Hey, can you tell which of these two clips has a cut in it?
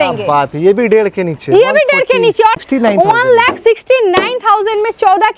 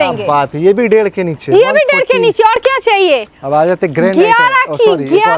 first; 1 cut; at 2.6 s

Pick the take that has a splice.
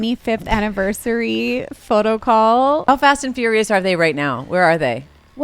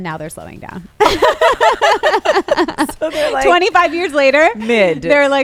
first; 1 cut; at 2.8 s

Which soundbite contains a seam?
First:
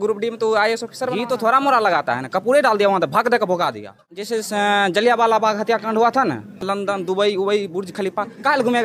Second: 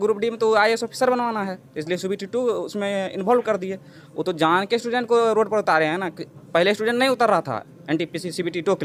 first; 3 cuts; at 1.1 s, 4.3 s, 6.6 s

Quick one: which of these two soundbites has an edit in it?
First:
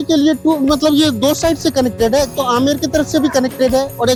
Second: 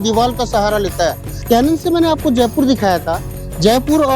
second; 1 cut; at 1.3 s

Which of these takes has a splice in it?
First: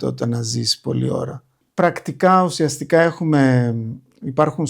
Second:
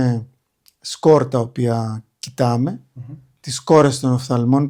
first; 1 cut; at 1.6 s

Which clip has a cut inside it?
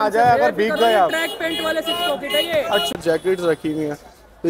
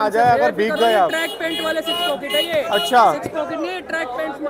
first; 1 cut; at 2.9 s

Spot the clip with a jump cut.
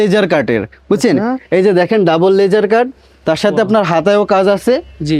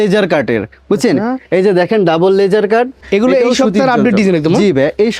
second; 1 cut; at 3.0 s

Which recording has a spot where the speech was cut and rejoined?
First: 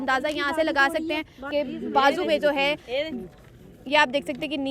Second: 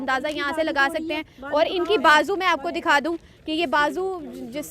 first; 1 cut; at 1.5 s

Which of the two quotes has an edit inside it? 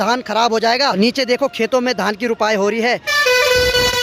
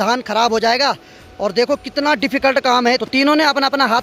first; 2 cuts; at 1.0 s, 3.1 s

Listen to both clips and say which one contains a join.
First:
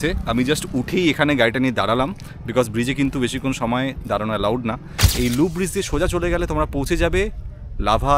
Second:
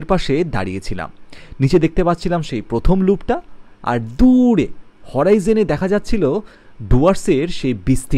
first; 1 cut; at 5.0 s

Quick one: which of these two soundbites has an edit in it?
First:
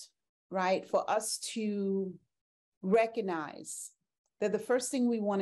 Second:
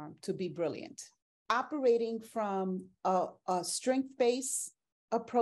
second; 1 cut; at 1.3 s

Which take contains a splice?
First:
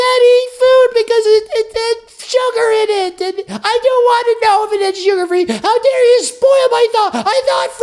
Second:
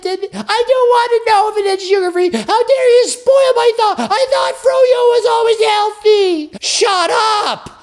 second; 1 cut; at 6.6 s

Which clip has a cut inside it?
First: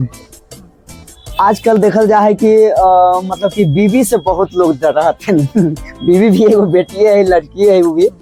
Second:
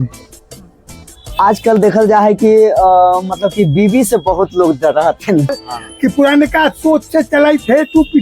second; 1 cut; at 5.5 s

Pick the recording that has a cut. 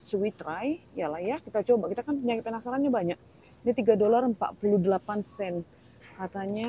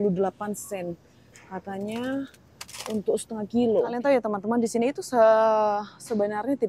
second; 1 cut; at 3.9 s

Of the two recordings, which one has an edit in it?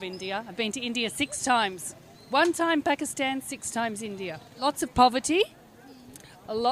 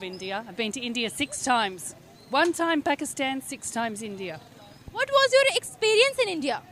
first; 1 cut; at 4.5 s

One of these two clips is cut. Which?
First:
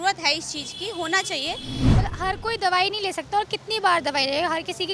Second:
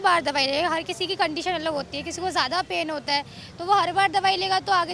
first; 1 cut; at 1.8 s

